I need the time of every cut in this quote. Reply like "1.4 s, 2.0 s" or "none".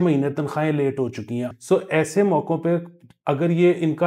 1.5 s